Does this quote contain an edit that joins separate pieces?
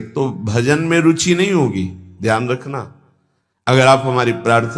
yes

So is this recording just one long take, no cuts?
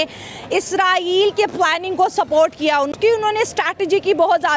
no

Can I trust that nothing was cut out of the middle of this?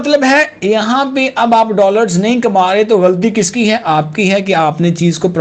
yes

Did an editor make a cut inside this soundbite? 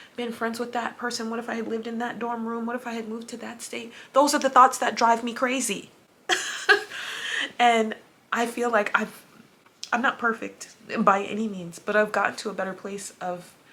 no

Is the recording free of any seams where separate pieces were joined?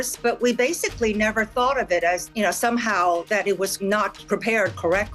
no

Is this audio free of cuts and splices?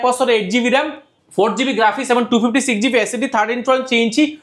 yes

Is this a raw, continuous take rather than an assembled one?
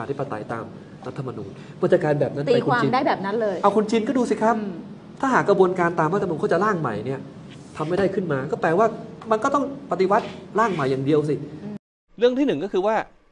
yes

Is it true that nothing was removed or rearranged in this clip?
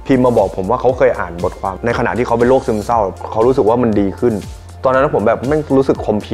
no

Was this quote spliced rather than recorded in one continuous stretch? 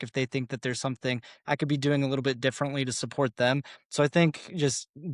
no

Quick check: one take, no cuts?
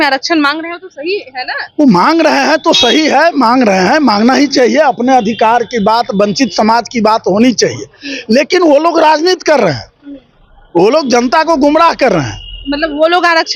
yes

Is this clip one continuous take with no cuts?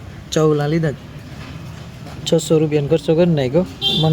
no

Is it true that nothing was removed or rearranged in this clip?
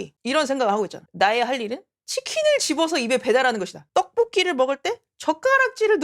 yes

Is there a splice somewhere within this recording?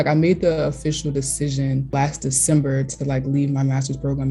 yes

